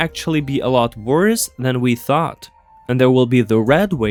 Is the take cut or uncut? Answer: uncut